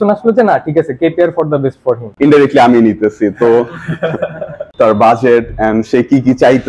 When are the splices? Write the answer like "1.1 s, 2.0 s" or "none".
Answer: 2.1 s, 4.7 s